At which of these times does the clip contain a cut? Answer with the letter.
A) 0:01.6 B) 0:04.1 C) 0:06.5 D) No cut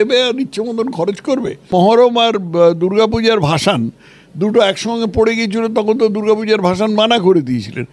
A